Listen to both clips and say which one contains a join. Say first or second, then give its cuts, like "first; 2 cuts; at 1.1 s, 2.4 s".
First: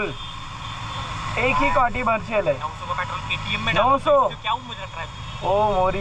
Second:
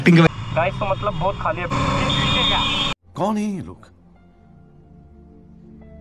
second; 1 cut; at 1.7 s